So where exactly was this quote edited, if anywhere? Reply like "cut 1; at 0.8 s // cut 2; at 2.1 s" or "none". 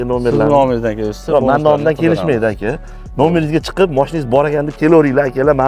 none